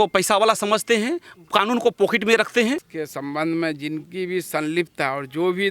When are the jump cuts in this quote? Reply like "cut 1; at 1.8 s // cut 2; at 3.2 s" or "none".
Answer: cut 1; at 2.9 s